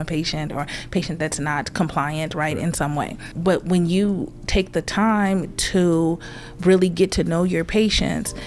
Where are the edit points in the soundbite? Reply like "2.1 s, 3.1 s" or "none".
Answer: 3.3 s